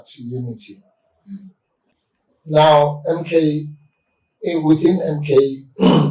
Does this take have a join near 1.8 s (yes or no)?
yes